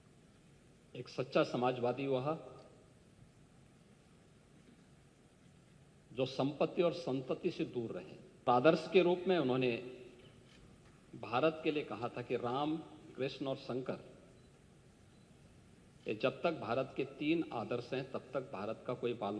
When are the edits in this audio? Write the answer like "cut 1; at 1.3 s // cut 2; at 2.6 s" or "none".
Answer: cut 1; at 8.5 s